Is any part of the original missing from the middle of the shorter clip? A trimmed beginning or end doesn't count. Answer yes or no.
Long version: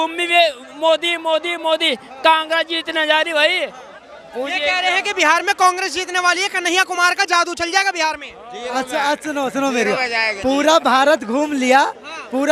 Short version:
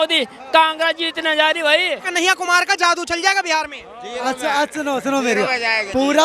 yes